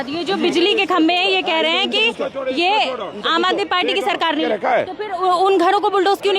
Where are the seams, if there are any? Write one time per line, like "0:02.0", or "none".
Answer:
0:04.4